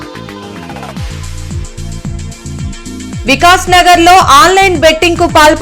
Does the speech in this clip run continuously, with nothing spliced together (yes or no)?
no